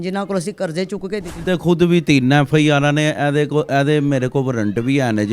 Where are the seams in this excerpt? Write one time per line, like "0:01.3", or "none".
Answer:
0:01.4